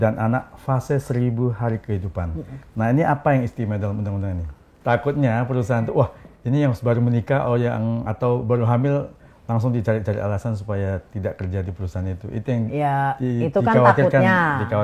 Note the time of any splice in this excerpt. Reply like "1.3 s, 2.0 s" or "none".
4.7 s